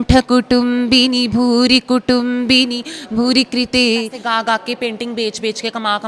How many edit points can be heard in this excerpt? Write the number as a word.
one